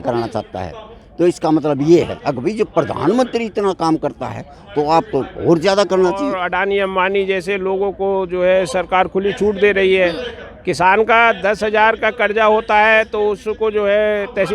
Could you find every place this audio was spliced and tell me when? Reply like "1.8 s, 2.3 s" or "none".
6.4 s